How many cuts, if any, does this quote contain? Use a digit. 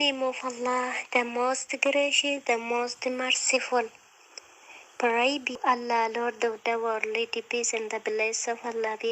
1